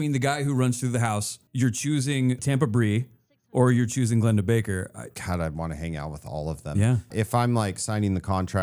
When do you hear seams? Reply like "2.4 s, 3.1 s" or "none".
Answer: 1.4 s, 2.4 s, 5.1 s, 7.1 s